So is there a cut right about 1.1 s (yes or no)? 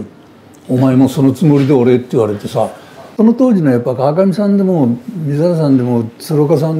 no